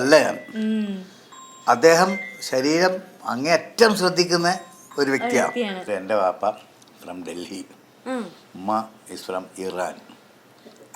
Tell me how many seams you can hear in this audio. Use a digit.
1